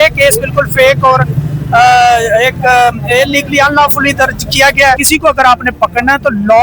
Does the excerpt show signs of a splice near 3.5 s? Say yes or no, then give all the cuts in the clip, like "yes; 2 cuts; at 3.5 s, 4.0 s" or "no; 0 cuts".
no; 1 cut; at 5.0 s